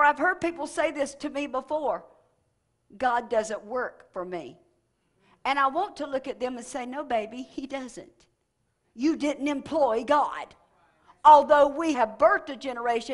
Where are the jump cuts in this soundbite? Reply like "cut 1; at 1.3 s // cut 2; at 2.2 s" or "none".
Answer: cut 1; at 11.9 s